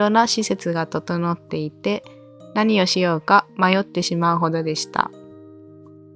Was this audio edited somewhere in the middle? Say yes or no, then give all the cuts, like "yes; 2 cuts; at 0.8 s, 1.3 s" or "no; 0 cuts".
yes; 1 cut; at 5.1 s